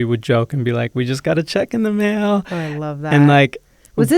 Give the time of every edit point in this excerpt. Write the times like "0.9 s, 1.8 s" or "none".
none